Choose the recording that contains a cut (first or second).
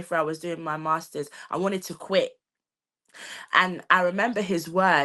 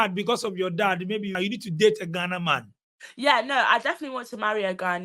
second